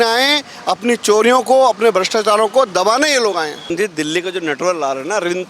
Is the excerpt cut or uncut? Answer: cut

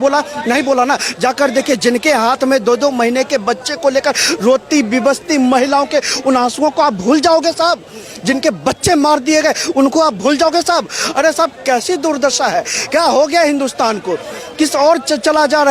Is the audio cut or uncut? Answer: uncut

